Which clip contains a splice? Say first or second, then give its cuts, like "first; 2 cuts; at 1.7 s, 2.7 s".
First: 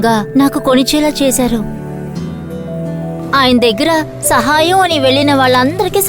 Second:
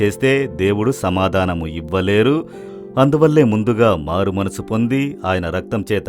first; 1 cut; at 3.2 s